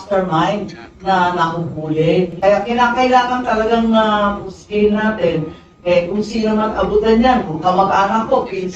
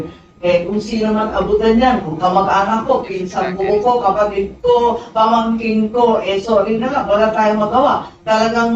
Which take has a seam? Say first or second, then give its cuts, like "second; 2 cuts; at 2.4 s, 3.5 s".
first; 1 cut; at 2.4 s